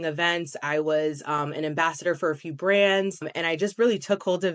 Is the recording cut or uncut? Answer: cut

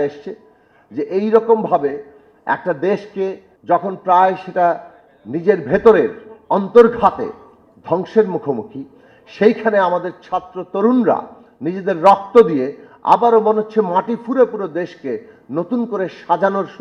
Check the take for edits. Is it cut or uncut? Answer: cut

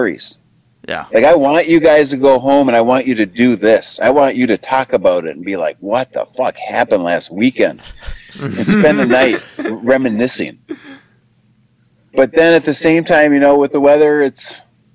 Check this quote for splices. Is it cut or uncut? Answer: uncut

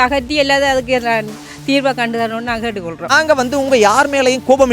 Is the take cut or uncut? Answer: cut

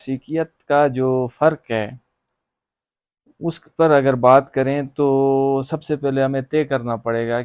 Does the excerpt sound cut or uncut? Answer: uncut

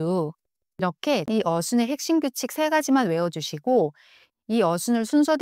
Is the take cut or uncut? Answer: cut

